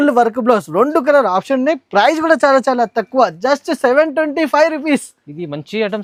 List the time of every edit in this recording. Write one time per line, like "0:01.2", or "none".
none